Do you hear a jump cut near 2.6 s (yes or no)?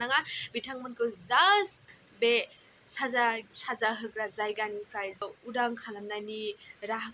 no